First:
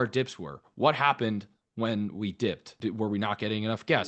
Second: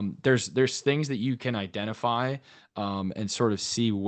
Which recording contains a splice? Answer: first; 1 cut; at 2.7 s

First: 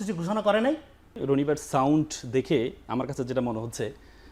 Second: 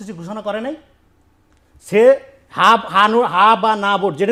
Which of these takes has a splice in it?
first; 1 cut; at 1.2 s

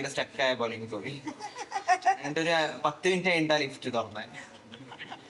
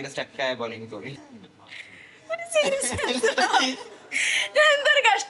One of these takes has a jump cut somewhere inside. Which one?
second; 1 cut; at 1.3 s

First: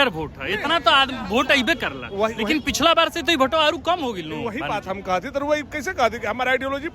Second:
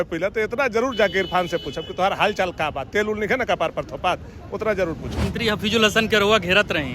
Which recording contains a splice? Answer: second; 1 cut; at 5.2 s

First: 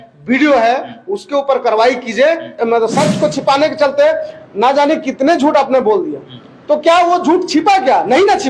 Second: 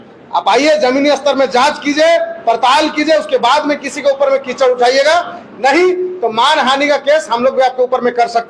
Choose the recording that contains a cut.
first; 1 cut; at 2.6 s

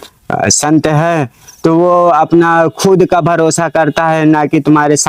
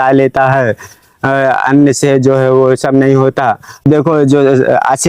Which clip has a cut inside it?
second; 1 cut; at 3.8 s

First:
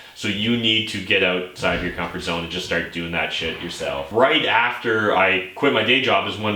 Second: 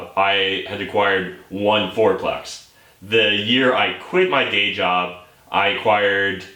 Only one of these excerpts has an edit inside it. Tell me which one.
first; 1 cut; at 4.1 s

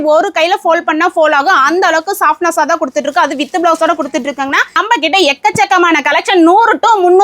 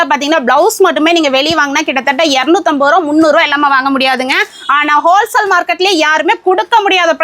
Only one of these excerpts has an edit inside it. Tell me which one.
first; 1 cut; at 4.8 s

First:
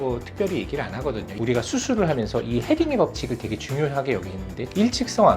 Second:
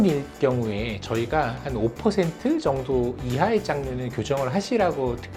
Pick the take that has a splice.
first; 1 cut; at 1.3 s

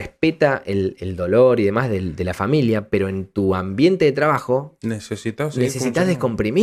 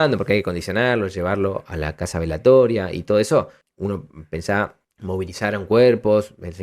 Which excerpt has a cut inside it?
second; 2 cuts; at 3.6 s, 4.9 s

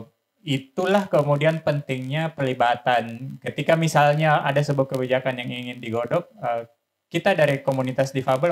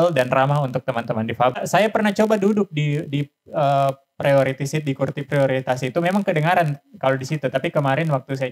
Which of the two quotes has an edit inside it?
second; 1 cut; at 1.6 s

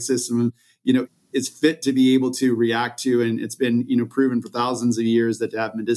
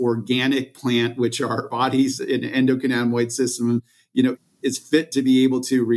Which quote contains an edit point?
second; 1 cut; at 1.7 s

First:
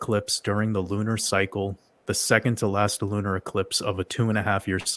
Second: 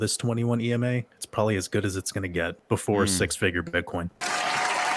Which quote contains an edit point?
second; 2 cuts; at 2.6 s, 4.1 s

